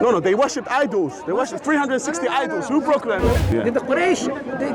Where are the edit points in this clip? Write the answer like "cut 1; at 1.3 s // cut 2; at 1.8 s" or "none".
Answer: cut 1; at 3.3 s